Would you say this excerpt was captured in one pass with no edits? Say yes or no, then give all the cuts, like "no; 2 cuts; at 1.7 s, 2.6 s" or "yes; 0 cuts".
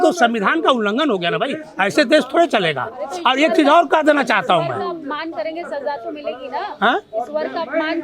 yes; 0 cuts